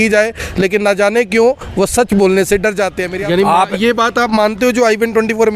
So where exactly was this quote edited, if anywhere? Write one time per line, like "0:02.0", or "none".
0:03.1